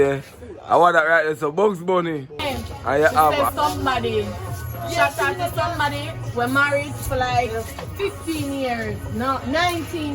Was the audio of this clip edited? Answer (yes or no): yes